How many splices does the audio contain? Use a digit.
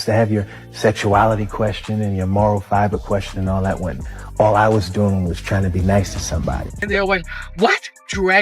1